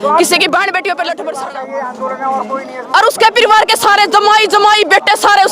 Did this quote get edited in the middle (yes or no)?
yes